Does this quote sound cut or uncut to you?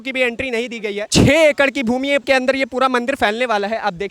cut